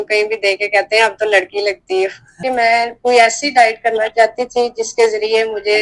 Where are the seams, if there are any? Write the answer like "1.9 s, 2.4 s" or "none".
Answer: 2.4 s